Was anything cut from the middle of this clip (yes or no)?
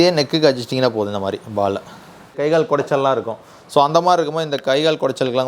yes